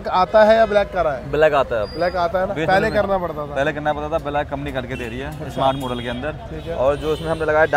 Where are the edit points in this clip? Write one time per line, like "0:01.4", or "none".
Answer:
none